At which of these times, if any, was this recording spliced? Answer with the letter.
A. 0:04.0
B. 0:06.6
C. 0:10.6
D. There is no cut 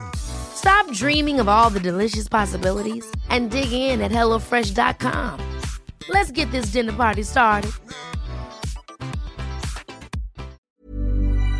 C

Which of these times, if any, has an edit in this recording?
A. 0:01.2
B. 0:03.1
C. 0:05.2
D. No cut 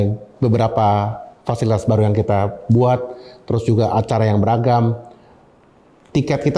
D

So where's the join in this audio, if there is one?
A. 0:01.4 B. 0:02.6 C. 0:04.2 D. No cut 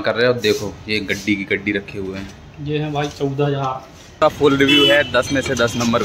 C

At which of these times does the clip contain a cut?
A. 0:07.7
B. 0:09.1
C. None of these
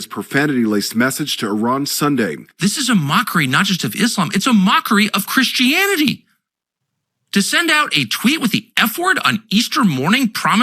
C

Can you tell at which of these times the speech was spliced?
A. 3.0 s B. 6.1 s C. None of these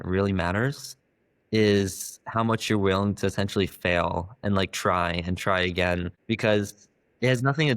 B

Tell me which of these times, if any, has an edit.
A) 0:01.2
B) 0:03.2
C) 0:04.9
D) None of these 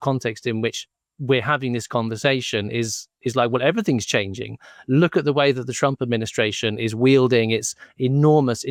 D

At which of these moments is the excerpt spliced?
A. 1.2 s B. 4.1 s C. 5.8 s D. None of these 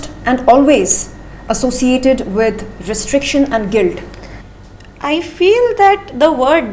D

